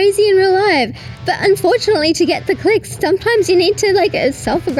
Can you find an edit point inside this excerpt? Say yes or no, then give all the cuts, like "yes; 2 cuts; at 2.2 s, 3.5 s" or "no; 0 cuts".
no; 0 cuts